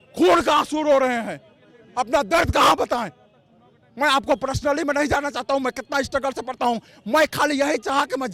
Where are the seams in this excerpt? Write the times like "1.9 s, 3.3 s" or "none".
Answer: none